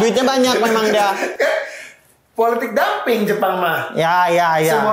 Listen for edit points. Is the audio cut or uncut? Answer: uncut